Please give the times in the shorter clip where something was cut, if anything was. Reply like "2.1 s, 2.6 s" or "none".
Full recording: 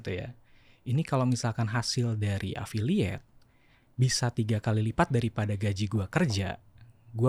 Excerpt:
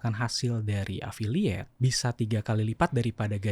1.7 s